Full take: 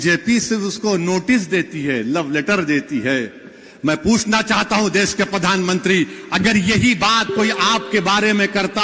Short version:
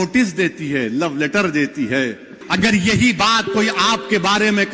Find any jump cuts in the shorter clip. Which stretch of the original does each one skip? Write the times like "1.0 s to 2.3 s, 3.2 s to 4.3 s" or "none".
3.5 s to 6.2 s